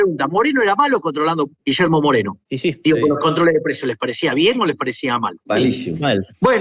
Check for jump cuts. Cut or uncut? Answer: cut